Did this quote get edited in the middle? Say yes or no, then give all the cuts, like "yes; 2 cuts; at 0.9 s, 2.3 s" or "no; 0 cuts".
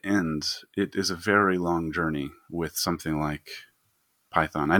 no; 0 cuts